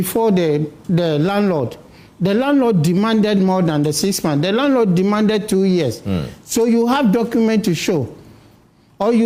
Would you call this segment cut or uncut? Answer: uncut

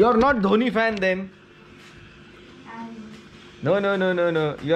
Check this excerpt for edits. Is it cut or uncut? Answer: uncut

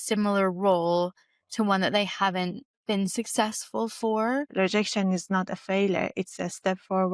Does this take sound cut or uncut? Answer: cut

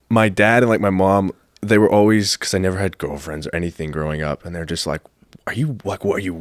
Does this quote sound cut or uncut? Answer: uncut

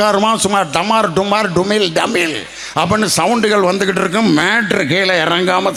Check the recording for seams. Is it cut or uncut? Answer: uncut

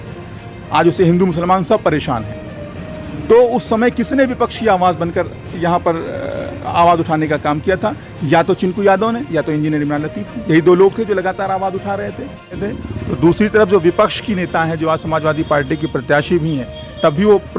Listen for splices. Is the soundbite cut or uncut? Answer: cut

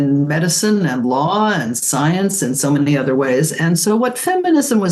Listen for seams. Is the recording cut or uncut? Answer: uncut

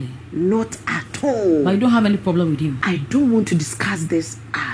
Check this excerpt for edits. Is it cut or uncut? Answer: cut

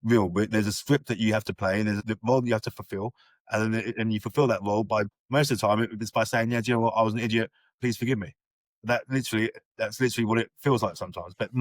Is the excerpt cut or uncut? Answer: cut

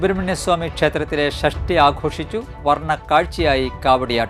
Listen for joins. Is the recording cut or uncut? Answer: uncut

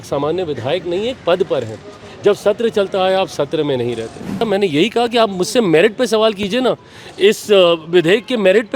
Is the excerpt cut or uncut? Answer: cut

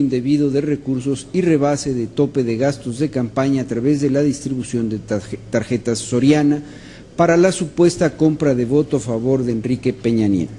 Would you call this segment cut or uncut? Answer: uncut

